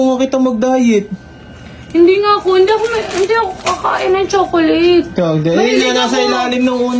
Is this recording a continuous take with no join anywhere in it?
yes; 0 cuts

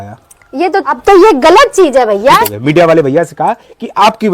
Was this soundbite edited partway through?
yes; 2 cuts; at 1.0 s, 2.5 s

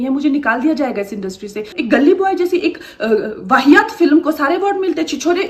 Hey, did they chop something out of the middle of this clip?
yes; 1 cut; at 1.6 s

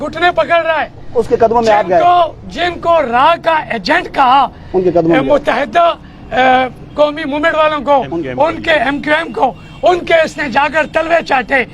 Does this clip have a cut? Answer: no; 0 cuts

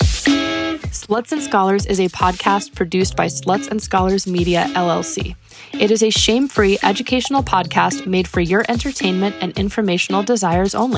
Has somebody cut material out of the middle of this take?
yes; 1 cut; at 0.9 s

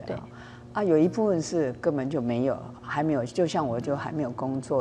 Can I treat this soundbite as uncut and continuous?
yes; 0 cuts

